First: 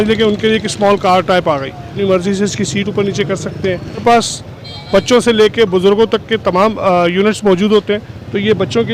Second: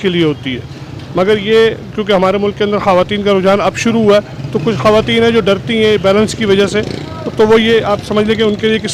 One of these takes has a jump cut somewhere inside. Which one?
first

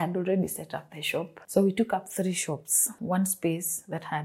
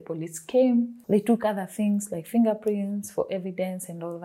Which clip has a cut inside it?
first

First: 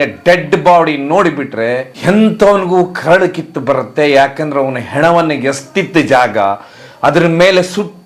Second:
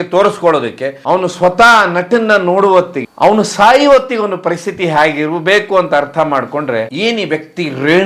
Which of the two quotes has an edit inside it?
second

